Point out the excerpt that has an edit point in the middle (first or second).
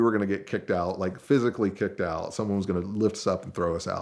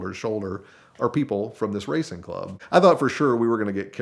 second